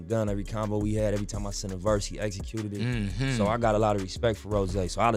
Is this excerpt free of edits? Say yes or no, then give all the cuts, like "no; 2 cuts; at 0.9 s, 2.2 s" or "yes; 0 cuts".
yes; 0 cuts